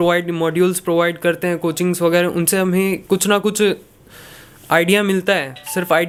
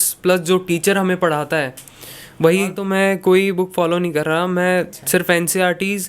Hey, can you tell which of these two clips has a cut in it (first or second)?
second